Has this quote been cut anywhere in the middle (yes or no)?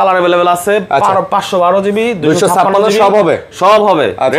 no